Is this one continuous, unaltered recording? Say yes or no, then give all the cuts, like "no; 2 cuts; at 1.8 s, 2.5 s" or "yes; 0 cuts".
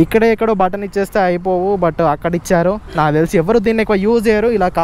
yes; 0 cuts